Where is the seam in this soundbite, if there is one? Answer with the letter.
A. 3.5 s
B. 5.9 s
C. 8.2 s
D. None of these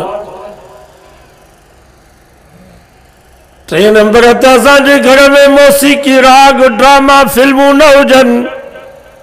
D